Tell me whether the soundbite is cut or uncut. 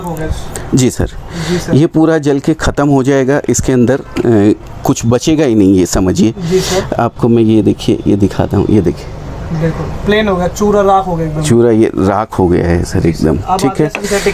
uncut